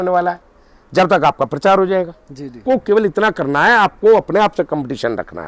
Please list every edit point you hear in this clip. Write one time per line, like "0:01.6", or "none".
0:02.6

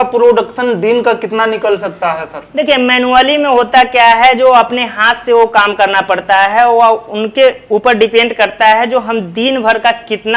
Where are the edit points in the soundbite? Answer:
none

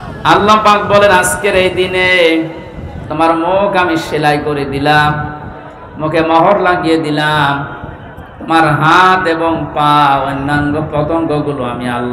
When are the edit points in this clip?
none

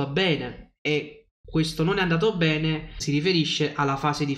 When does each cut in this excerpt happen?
0:02.9

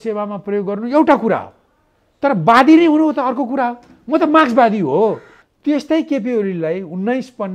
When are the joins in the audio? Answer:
0:05.3

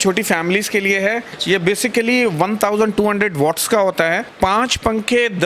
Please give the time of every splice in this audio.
0:01.3
0:04.3

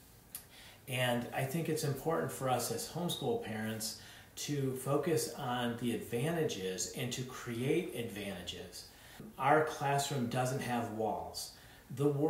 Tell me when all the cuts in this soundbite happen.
0:09.3

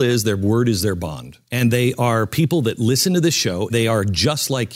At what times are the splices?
0:01.4
0:03.7

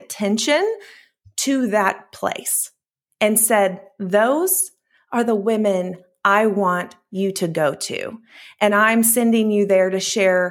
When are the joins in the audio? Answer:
none

